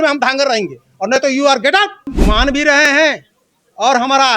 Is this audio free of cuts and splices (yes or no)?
no